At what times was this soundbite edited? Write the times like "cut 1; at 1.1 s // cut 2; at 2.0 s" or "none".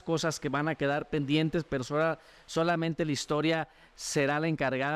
none

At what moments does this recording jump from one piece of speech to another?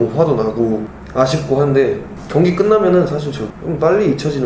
cut 1; at 1.0 s // cut 2; at 2.1 s // cut 3; at 3.4 s

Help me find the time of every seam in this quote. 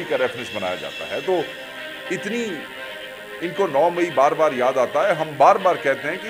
none

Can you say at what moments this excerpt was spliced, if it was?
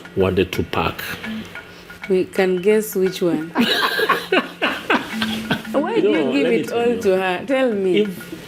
cut 1; at 5.7 s

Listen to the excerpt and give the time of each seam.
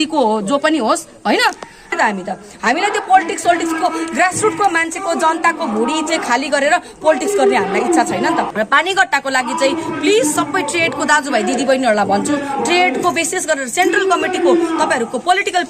cut 1; at 1.9 s // cut 2; at 8.5 s

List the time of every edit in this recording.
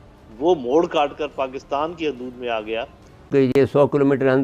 cut 1; at 3.3 s

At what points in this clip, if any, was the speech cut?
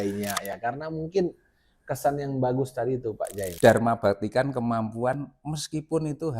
cut 1; at 3.5 s

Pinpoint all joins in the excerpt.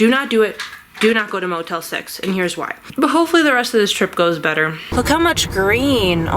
cut 1; at 2.8 s // cut 2; at 4.8 s

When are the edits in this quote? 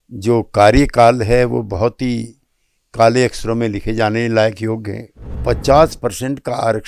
cut 1; at 5.4 s

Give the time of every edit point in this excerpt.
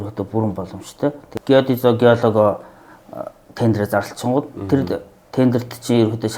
cut 1; at 1.2 s

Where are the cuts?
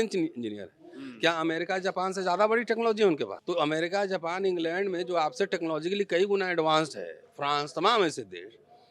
cut 1; at 3.3 s

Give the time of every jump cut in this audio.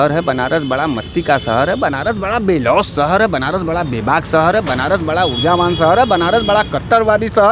none

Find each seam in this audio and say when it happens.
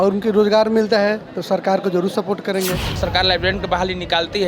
cut 1; at 3.0 s

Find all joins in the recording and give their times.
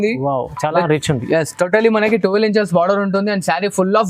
none

